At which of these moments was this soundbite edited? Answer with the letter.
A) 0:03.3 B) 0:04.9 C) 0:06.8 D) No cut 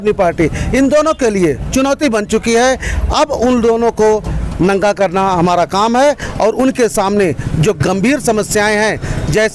D